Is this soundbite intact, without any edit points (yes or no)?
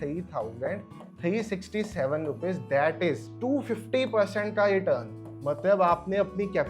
no